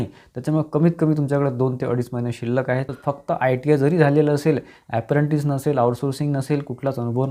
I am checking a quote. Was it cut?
yes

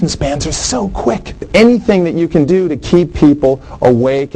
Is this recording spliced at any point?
yes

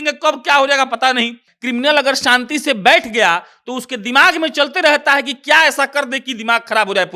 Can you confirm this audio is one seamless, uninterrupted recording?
no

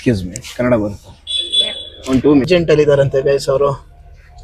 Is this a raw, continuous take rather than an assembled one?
no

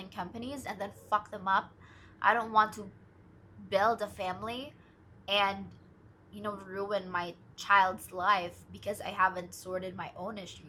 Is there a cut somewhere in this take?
no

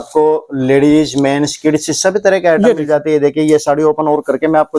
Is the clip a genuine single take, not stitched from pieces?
yes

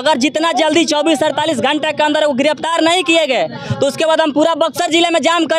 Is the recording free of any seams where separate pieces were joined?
yes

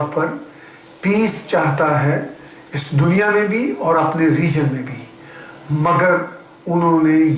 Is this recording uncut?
yes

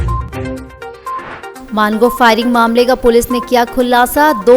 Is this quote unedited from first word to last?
no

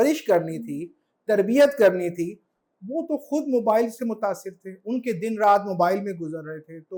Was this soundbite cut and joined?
no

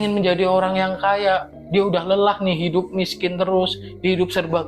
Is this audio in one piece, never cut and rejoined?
yes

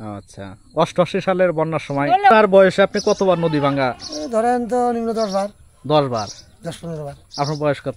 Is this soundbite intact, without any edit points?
no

